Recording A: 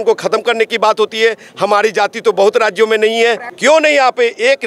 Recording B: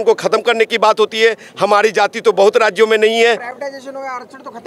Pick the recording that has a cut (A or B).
A